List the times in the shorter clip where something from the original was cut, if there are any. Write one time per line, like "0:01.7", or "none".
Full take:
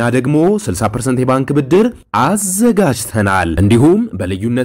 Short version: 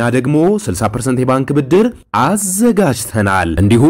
none

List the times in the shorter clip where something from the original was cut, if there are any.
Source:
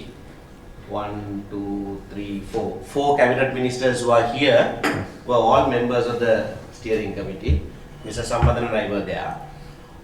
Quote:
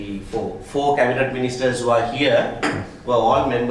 none

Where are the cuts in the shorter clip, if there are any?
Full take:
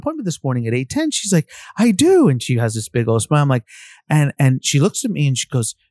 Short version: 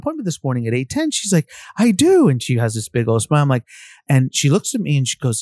0:04.0

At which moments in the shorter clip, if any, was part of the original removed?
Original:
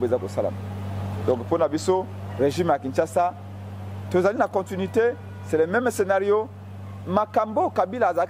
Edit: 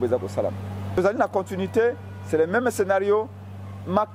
0:01.0

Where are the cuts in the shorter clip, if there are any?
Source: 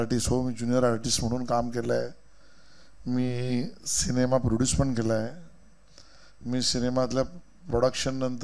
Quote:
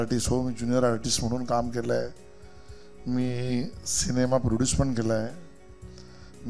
none

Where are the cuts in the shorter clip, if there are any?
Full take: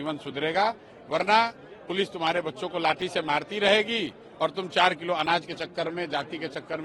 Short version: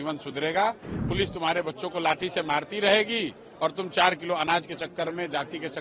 0:00.9

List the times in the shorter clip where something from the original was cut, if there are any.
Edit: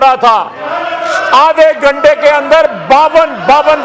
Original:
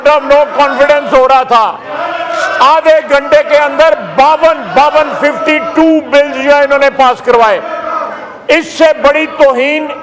none

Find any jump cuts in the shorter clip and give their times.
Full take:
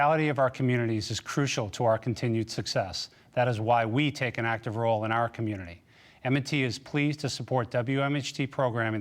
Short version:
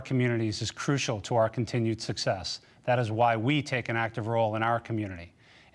none

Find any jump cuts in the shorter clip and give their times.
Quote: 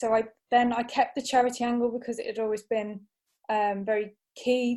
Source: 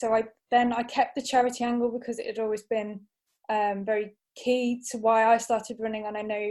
none

